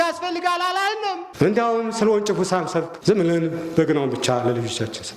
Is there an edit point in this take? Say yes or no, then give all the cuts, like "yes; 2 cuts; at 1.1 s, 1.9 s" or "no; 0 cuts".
yes; 2 cuts; at 1.3 s, 2.9 s